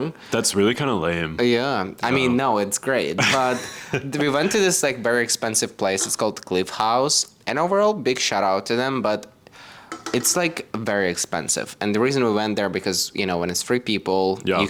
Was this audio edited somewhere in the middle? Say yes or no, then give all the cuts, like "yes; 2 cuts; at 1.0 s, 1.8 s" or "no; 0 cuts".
no; 0 cuts